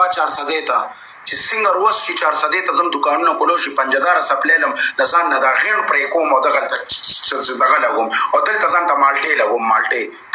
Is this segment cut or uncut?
uncut